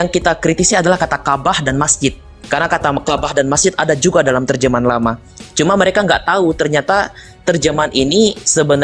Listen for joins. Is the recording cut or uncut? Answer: uncut